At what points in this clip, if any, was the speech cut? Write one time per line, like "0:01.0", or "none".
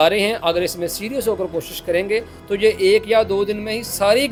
none